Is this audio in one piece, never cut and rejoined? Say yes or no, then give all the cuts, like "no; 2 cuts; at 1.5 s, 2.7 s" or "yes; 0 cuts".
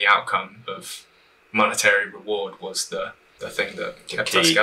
no; 1 cut; at 3.2 s